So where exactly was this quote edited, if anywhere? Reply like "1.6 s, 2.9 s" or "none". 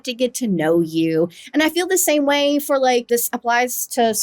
3.1 s